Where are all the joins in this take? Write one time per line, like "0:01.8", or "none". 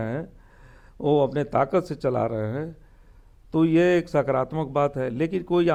none